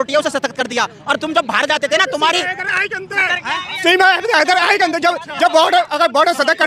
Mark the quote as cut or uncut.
uncut